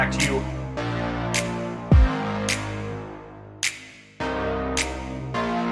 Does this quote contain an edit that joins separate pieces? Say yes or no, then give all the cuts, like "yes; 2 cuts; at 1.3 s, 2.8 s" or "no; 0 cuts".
no; 0 cuts